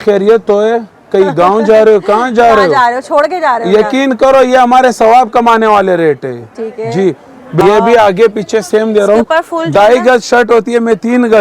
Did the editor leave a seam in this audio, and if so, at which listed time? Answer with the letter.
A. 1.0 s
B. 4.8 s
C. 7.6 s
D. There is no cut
C